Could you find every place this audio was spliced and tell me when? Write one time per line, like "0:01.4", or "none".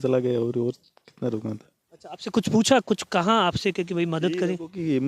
none